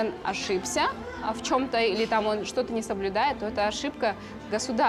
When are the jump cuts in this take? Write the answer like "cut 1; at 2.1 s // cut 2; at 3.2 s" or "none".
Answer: none